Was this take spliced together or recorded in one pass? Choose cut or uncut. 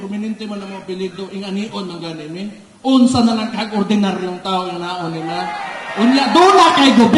uncut